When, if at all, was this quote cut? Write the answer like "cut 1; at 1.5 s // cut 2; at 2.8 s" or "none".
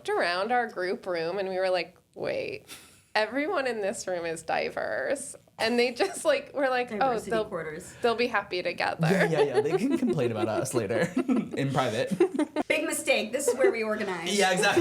cut 1; at 12.6 s